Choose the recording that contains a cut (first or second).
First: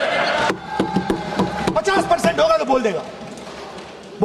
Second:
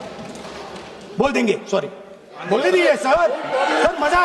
second